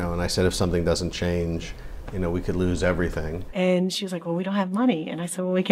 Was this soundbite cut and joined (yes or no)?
yes